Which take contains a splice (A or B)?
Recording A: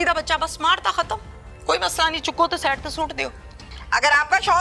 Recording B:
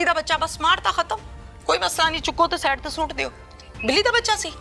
A